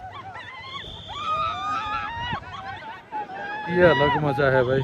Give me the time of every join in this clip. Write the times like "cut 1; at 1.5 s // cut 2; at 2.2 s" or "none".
none